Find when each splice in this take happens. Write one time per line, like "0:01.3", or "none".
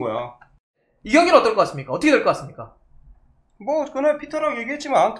0:00.9